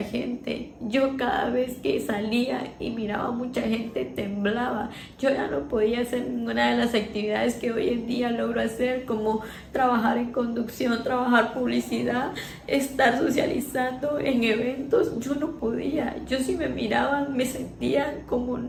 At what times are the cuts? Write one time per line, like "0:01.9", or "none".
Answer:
none